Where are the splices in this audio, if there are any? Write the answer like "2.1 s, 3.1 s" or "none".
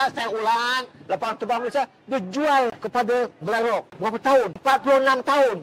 none